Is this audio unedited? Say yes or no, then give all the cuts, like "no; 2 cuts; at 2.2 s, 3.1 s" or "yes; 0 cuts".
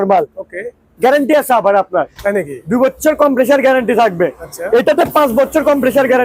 yes; 0 cuts